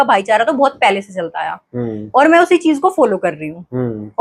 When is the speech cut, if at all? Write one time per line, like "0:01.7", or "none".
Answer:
none